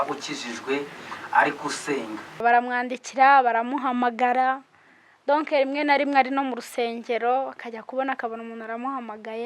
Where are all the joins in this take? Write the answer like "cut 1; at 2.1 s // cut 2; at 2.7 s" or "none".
cut 1; at 2.4 s